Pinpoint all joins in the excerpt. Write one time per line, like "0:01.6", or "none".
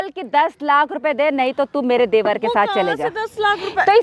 none